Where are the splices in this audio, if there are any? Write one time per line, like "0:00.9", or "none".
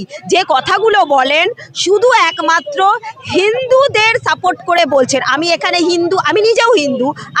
none